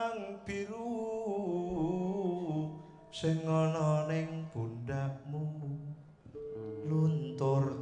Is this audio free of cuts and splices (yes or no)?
yes